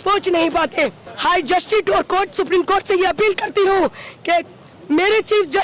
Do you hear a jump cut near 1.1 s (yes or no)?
no